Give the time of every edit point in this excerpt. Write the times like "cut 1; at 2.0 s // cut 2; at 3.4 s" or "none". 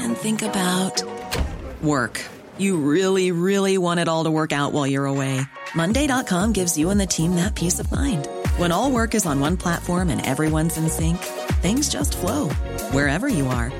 none